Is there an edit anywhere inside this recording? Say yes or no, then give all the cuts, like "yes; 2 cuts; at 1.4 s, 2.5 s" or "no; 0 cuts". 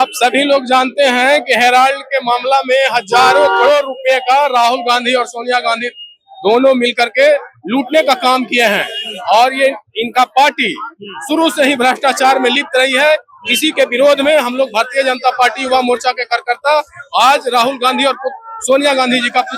no; 0 cuts